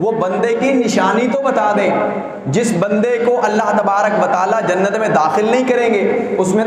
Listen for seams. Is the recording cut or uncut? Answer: uncut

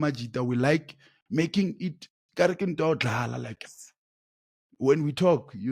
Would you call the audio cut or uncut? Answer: uncut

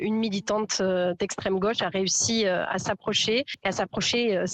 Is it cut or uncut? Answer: uncut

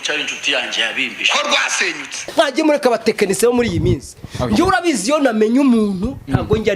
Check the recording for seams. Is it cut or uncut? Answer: cut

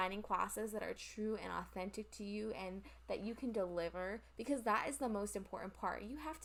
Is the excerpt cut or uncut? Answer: uncut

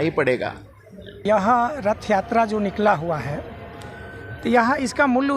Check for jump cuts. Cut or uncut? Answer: cut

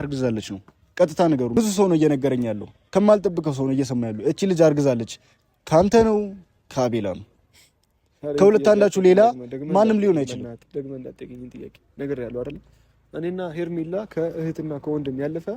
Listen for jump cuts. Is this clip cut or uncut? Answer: cut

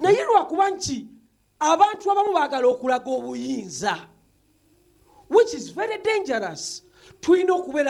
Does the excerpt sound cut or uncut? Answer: uncut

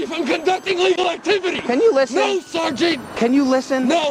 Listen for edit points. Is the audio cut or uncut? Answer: cut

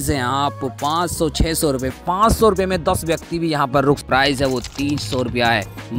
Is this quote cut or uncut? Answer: cut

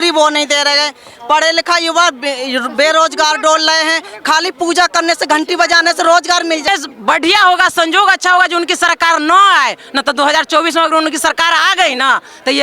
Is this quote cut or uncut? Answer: cut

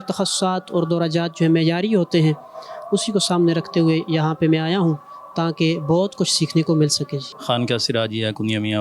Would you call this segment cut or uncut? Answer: uncut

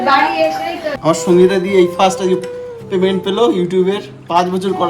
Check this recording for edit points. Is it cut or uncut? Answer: cut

